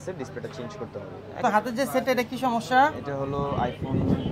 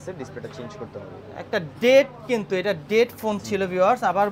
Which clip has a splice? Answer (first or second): first